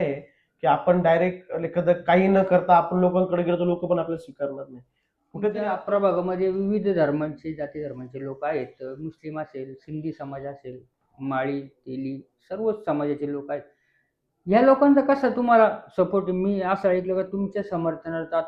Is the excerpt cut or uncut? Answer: cut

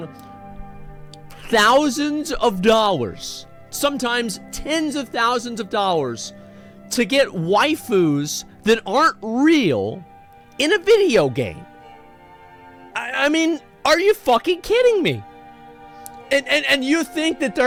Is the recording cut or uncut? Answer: uncut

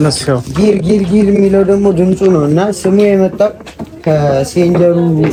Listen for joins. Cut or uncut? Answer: uncut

